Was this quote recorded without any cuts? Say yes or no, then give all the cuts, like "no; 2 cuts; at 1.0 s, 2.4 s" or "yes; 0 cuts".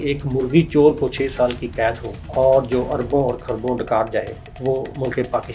no; 2 cuts; at 2.1 s, 4.4 s